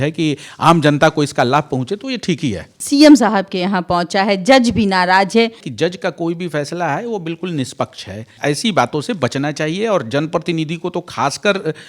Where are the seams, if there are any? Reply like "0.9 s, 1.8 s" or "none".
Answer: 2.7 s, 5.6 s, 8.3 s